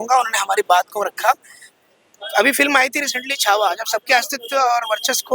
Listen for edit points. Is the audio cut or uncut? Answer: uncut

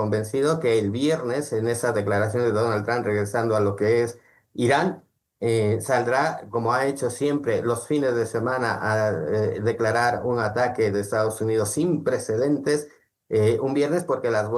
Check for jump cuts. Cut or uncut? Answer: uncut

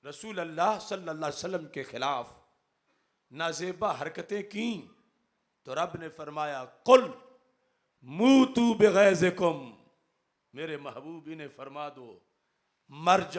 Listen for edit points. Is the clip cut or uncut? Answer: uncut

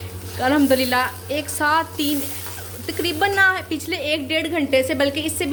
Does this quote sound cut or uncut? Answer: uncut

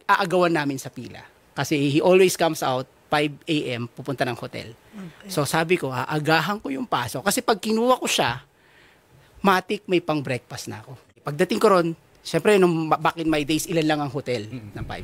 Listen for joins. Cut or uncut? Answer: cut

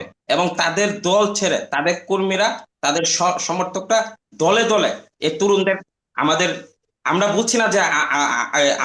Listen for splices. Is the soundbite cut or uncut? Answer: uncut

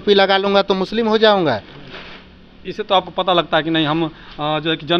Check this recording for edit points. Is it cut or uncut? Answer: uncut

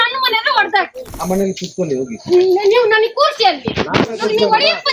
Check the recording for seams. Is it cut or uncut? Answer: cut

